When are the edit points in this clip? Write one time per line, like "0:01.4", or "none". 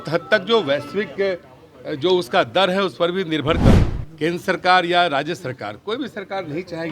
0:03.8